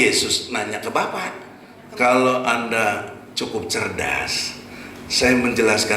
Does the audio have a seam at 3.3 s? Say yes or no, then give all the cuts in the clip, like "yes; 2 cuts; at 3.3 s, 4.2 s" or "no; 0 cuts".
no; 1 cut; at 1.7 s